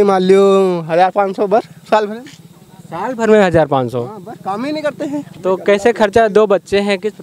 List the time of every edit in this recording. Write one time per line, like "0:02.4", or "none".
0:05.3